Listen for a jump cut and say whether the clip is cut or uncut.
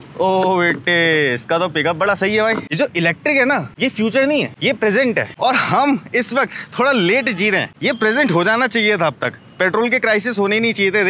cut